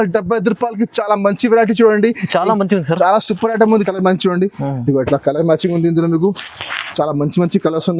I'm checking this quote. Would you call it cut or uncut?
cut